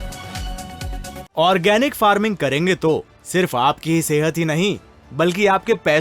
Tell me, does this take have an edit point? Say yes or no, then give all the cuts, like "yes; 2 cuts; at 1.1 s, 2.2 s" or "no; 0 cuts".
yes; 1 cut; at 1.3 s